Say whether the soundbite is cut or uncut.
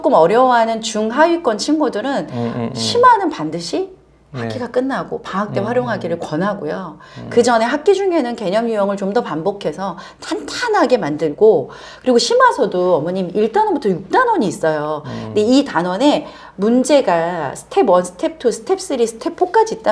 uncut